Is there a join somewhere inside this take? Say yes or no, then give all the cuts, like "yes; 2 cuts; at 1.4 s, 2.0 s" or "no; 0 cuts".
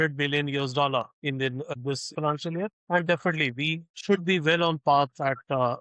yes; 3 cuts; at 1.7 s, 2.8 s, 3.9 s